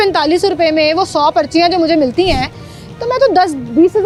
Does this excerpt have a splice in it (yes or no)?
no